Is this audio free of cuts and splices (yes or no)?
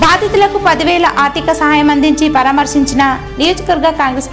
yes